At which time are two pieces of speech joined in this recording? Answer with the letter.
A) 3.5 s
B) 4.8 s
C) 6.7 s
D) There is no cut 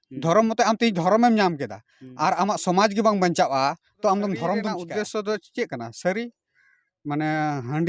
B